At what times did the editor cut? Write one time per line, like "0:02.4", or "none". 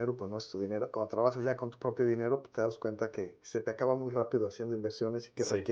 0:00.9